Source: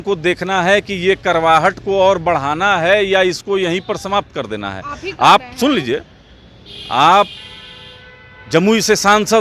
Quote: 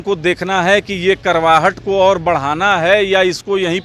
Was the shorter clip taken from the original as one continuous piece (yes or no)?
yes